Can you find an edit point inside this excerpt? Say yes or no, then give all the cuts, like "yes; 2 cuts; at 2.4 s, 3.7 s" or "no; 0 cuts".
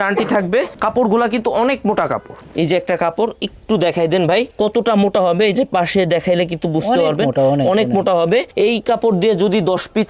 no; 0 cuts